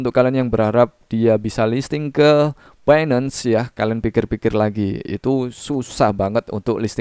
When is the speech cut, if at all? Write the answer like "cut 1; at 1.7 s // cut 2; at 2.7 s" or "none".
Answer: none